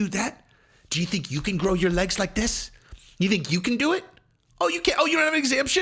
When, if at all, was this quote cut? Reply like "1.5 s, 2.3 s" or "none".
none